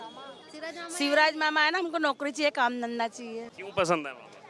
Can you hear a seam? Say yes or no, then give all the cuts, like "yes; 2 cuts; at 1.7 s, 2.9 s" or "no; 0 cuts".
yes; 1 cut; at 3.6 s